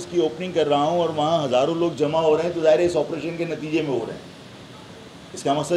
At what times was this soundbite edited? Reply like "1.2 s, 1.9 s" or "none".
none